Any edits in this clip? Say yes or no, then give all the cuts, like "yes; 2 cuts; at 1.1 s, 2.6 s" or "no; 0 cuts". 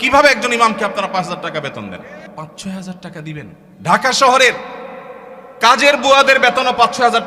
yes; 2 cuts; at 2.2 s, 3.6 s